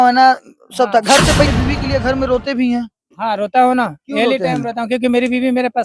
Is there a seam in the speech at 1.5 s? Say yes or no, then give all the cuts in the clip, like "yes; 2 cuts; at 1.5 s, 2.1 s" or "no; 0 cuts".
yes; 1 cut; at 1.5 s